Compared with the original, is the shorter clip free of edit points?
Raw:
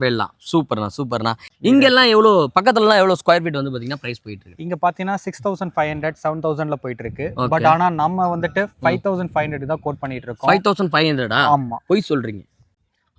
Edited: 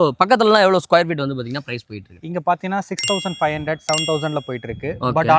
yes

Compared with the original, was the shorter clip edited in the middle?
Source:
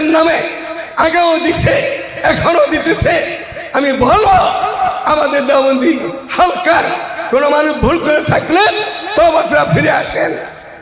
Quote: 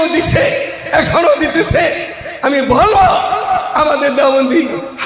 no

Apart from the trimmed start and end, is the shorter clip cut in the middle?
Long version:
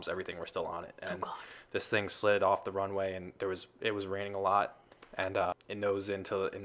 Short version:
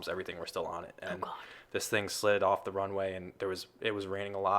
no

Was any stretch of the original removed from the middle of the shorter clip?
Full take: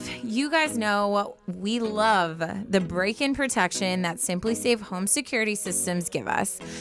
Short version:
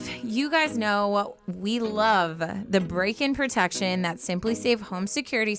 no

